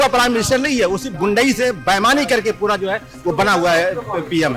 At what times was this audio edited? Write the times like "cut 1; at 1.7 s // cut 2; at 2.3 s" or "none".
none